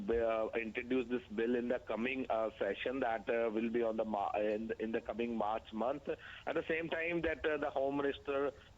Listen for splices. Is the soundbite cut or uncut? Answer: cut